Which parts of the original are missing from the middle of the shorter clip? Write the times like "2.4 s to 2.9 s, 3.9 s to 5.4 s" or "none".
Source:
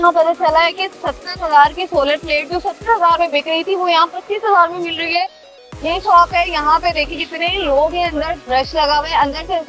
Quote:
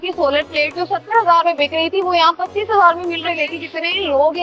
5.0 s to 6.9 s